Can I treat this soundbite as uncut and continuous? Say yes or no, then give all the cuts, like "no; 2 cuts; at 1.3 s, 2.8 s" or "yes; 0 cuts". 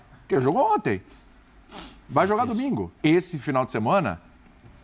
no; 1 cut; at 2.9 s